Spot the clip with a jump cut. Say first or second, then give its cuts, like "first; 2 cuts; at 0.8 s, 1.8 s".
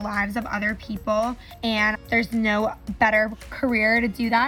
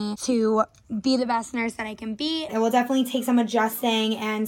first; 1 cut; at 1.8 s